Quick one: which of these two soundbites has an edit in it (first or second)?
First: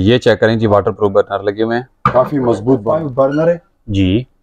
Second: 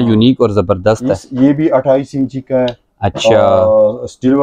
first